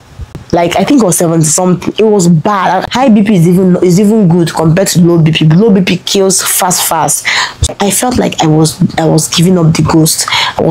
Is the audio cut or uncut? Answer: cut